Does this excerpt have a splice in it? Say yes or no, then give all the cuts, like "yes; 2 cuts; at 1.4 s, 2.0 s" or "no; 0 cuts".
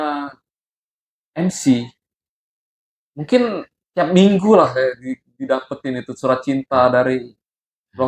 no; 0 cuts